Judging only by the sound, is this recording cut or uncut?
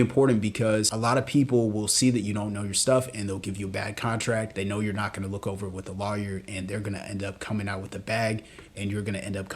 cut